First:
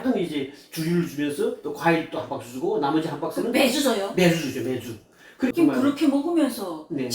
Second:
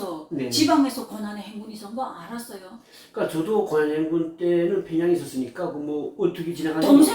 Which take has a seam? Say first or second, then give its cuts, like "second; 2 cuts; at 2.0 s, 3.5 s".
first; 1 cut; at 5.5 s